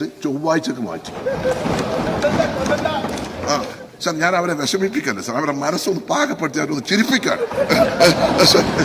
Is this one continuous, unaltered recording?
no; 1 cut; at 3.8 s

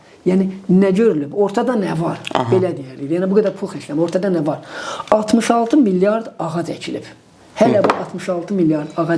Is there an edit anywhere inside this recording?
no; 0 cuts

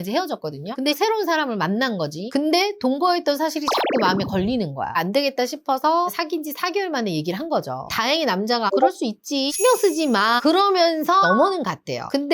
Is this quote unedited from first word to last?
no; 4 cuts; at 1.0 s, 5.0 s, 7.9 s, 11.2 s

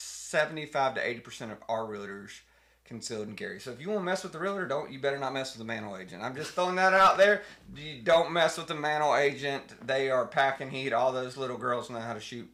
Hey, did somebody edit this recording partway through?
no; 0 cuts

